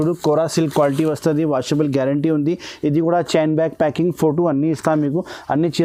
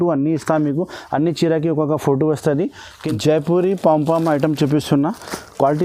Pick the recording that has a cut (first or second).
second